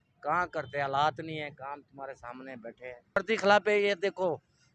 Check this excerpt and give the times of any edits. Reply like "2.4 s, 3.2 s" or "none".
3.2 s